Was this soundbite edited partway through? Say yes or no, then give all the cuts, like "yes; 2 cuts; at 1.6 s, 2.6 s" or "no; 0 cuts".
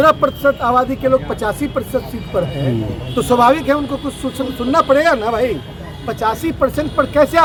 no; 0 cuts